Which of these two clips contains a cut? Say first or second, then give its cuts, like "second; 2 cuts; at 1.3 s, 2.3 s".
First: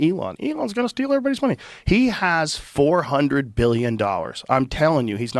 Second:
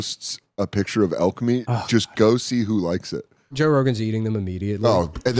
second; 1 cut; at 3.5 s